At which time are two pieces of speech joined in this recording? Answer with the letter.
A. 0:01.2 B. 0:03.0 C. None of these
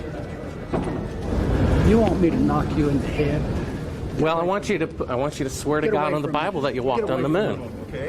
A